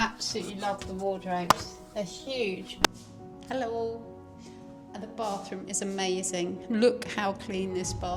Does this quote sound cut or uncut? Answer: cut